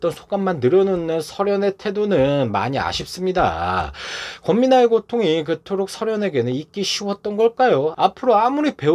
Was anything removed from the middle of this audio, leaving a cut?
yes; 1 cut; at 7.9 s

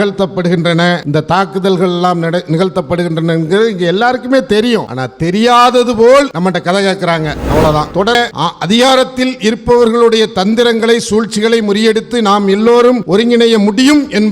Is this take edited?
yes; 1 cut; at 8.1 s

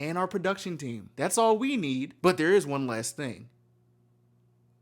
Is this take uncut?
no; 2 cuts; at 1.0 s, 2.1 s

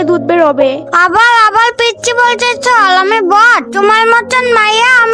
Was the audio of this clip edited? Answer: yes; 2 cuts; at 0.9 s, 3.6 s

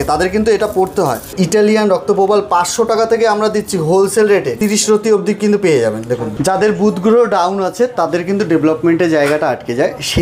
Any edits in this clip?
yes; 3 cuts; at 1.3 s, 4.5 s, 6.2 s

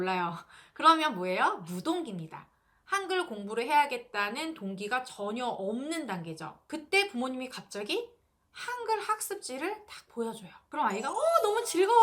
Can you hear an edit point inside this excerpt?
no; 0 cuts

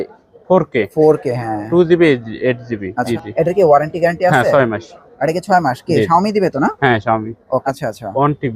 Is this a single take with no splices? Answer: no; 2 cuts; at 3.1 s, 7.6 s

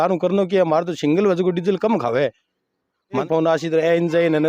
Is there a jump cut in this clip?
yes; 1 cut; at 3.2 s

